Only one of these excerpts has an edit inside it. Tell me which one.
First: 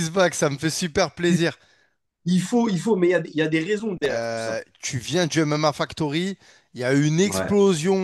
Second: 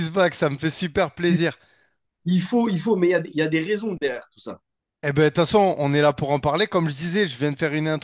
first; 1 cut; at 4.2 s

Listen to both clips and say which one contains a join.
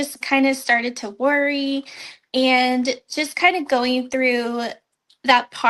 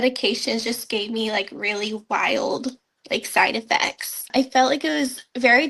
second; 1 cut; at 4.3 s

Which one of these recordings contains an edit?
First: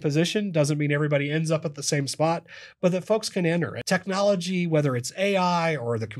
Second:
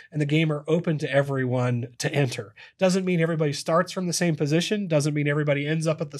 first; 1 cut; at 3.8 s

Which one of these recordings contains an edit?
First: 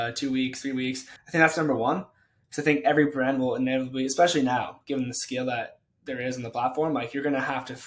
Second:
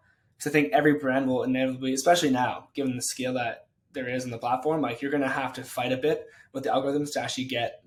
first; 1 cut; at 1.1 s

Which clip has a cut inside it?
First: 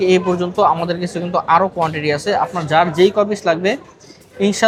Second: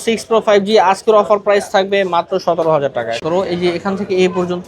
second; 1 cut; at 3.2 s

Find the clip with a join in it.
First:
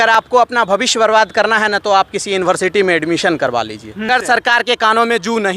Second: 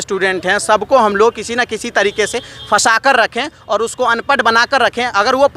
first; 1 cut; at 4.1 s

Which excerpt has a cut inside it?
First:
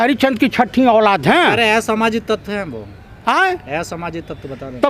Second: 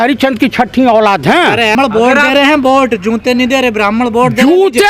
second; 1 cut; at 1.7 s

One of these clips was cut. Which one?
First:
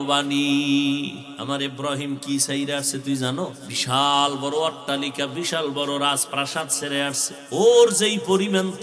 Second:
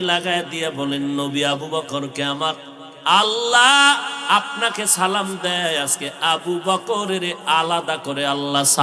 first; 3 cuts; at 1.3 s, 3.7 s, 7.3 s

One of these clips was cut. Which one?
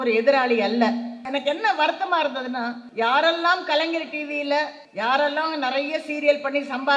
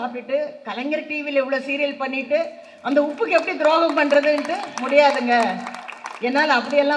first; 3 cuts; at 1.2 s, 2.8 s, 4.8 s

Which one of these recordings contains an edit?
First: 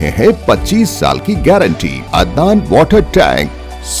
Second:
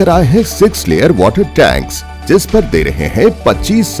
first; 1 cut; at 2.0 s

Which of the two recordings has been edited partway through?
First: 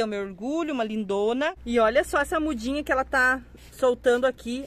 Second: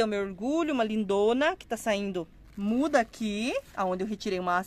first; 1 cut; at 1.6 s

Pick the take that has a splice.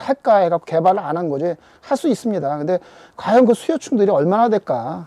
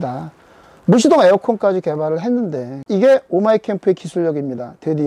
second; 1 cut; at 2.8 s

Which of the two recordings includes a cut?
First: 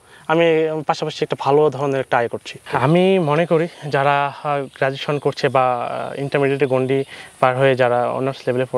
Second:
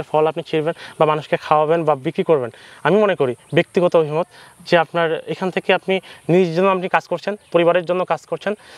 first; 1 cut; at 2.6 s

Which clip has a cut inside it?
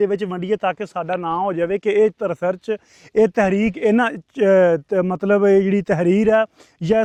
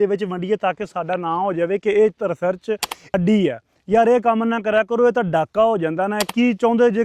second; 2 cuts; at 3.1 s, 6.3 s

